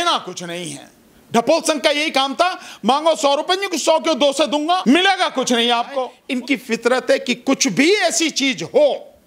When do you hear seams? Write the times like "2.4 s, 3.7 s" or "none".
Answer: 4.8 s, 6.2 s